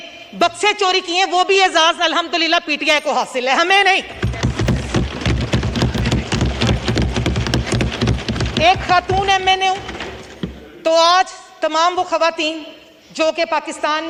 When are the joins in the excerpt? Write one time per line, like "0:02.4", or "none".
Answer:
none